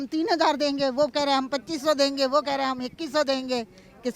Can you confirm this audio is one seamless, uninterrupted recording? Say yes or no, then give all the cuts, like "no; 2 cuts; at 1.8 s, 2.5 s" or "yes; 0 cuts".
yes; 0 cuts